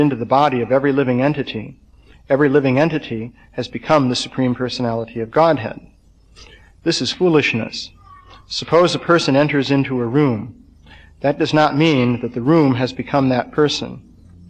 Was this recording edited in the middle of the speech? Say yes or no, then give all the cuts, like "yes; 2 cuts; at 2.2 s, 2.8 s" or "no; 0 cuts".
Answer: no; 0 cuts